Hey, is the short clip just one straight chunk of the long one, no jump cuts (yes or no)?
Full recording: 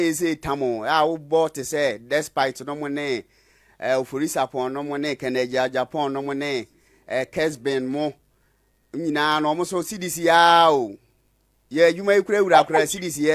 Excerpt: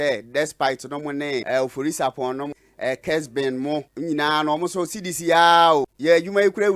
no